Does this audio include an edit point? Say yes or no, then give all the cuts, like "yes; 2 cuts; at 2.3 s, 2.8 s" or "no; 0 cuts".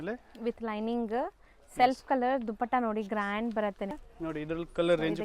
yes; 1 cut; at 4.0 s